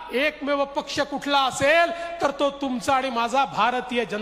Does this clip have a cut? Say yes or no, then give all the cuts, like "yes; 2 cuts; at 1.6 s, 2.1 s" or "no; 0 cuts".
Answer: no; 0 cuts